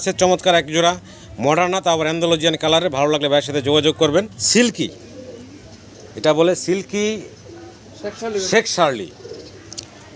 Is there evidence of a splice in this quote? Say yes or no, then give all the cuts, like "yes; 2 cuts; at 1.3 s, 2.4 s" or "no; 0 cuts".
yes; 1 cut; at 4.4 s